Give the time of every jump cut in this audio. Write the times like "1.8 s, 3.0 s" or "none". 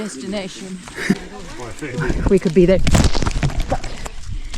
1.2 s